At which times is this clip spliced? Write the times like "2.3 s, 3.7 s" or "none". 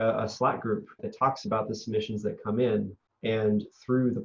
1.1 s, 3.0 s